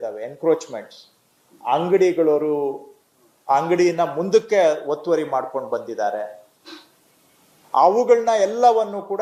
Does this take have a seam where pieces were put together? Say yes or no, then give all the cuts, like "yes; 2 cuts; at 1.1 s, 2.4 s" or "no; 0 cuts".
no; 0 cuts